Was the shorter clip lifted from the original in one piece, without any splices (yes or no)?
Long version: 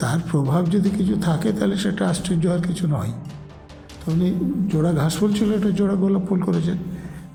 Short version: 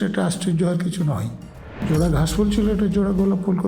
no